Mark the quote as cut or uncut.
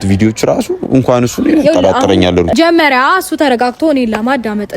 cut